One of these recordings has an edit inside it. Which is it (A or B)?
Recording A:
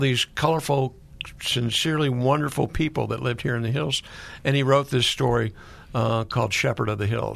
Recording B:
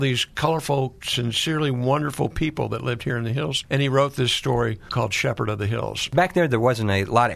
B